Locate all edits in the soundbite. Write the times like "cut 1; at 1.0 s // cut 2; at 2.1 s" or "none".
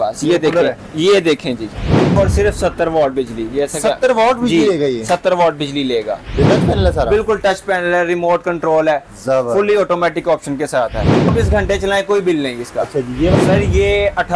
cut 1; at 2.1 s // cut 2; at 6.5 s // cut 3; at 11.3 s // cut 4; at 13.4 s